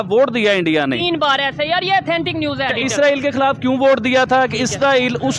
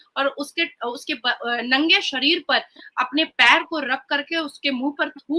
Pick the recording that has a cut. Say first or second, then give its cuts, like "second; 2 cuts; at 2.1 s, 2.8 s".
first; 1 cut; at 2.7 s